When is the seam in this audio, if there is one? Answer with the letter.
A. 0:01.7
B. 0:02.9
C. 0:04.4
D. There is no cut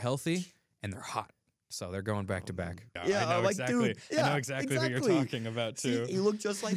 B